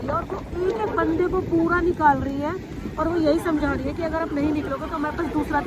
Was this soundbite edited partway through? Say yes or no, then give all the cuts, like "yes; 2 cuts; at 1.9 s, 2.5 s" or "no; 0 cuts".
no; 0 cuts